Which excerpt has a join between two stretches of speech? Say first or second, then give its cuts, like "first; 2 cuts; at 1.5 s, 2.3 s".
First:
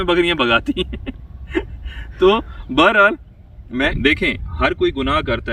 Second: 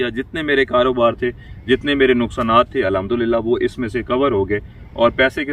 first; 1 cut; at 3.9 s